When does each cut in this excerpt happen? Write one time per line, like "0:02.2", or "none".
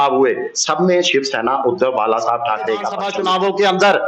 0:03.0